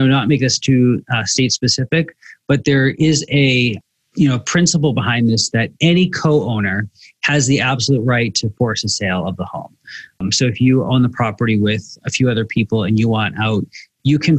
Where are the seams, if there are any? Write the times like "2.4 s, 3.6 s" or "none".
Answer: none